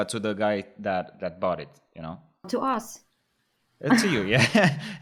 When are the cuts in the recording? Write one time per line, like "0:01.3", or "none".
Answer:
none